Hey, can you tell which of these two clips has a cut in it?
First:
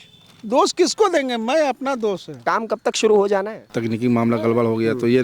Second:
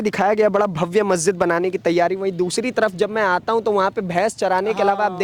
first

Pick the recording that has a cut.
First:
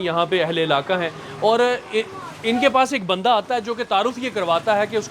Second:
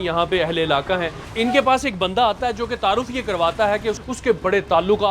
second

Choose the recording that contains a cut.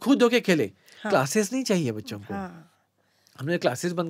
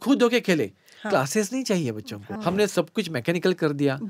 second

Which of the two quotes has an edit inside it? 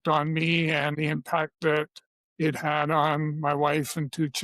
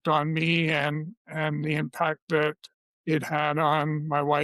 first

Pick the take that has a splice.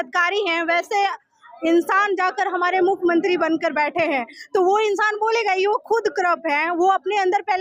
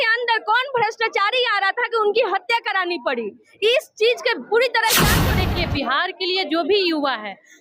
second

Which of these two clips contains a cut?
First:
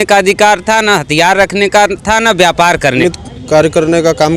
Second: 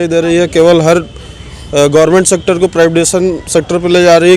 first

